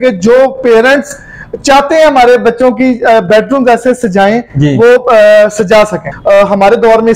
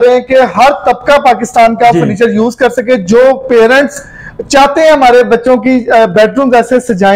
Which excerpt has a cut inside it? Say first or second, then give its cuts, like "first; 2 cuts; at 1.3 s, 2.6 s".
first; 1 cut; at 6.1 s